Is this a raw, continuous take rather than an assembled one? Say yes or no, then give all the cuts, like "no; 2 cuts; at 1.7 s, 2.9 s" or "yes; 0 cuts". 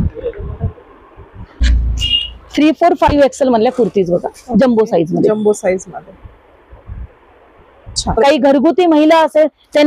no; 2 cuts; at 1.6 s, 8.2 s